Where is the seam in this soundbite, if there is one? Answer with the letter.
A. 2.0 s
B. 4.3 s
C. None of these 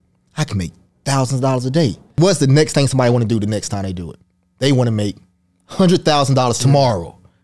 A